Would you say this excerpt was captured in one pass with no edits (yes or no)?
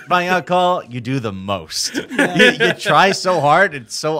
yes